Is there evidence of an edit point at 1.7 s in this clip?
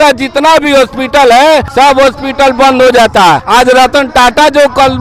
yes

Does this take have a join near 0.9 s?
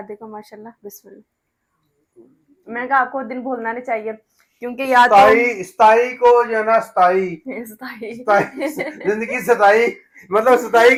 no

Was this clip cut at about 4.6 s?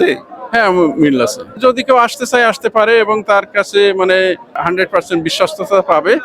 yes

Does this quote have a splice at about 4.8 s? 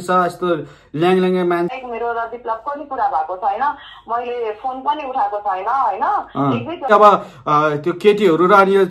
no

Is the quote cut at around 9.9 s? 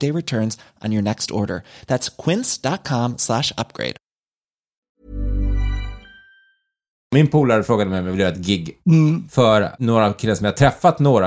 no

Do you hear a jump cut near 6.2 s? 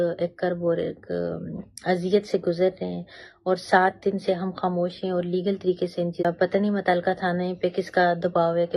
yes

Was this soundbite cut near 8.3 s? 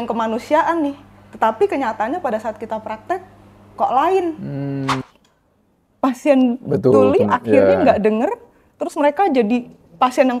no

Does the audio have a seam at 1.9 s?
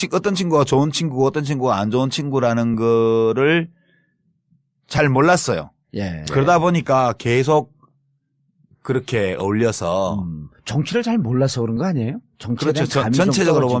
no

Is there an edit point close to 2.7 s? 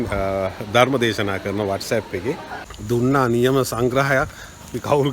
yes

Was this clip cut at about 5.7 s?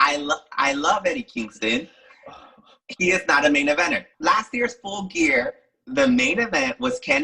no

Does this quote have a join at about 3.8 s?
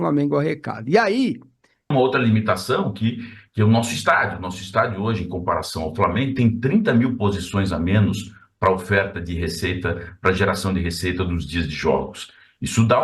no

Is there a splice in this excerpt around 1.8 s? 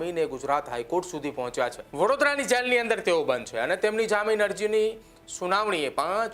yes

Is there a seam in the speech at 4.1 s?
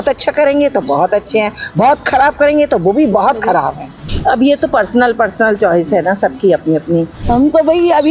yes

